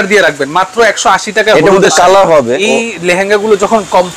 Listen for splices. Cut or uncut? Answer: cut